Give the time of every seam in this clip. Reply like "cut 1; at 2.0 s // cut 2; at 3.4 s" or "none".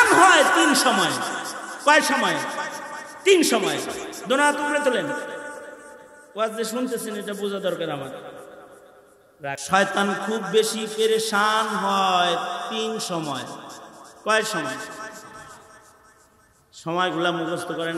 cut 1; at 9.6 s